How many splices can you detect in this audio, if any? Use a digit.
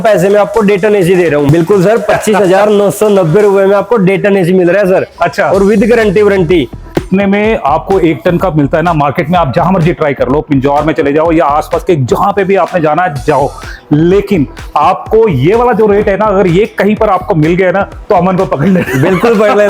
2